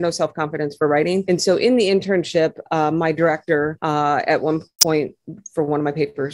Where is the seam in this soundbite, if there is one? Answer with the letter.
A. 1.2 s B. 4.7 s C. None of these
C